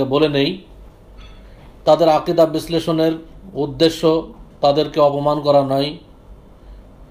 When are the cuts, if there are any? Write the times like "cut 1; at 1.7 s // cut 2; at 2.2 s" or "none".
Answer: none

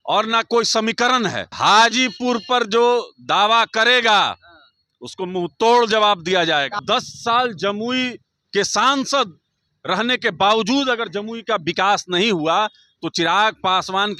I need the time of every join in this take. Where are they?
cut 1; at 1.5 s // cut 2; at 6.8 s

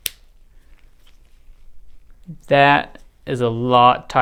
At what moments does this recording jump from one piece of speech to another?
none

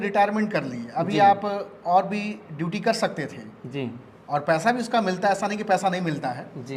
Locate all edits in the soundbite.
none

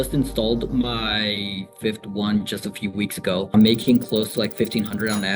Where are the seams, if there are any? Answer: cut 1; at 3.5 s

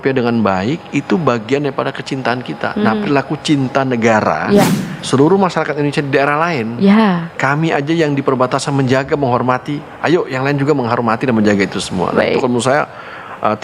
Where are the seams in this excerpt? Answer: cut 1; at 5.0 s

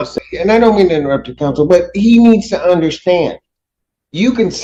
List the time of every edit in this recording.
none

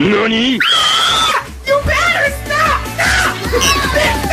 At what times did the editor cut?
none

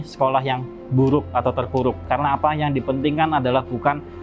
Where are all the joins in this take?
cut 1; at 2.0 s

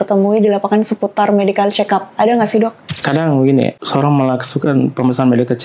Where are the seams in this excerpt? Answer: cut 1; at 2.9 s // cut 2; at 3.8 s

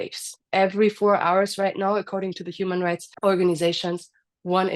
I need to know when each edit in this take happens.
cut 1; at 3.1 s

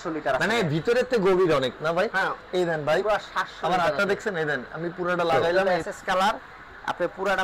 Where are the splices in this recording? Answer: cut 1; at 5.6 s

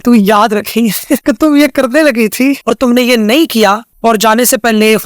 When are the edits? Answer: cut 1; at 1.2 s // cut 2; at 2.7 s // cut 3; at 3.9 s

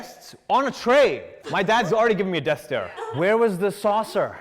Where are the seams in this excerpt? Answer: cut 1; at 3.0 s

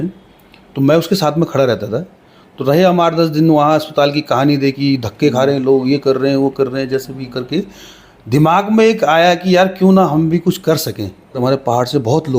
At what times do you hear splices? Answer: cut 1; at 11.4 s

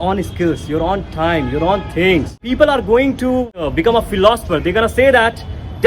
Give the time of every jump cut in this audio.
cut 1; at 2.4 s // cut 2; at 3.7 s

